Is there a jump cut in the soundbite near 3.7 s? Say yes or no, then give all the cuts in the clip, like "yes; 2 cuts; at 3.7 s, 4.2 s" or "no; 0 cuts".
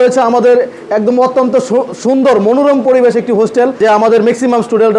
yes; 1 cut; at 3.7 s